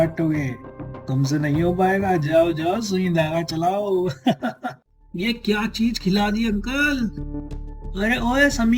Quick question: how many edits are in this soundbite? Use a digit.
1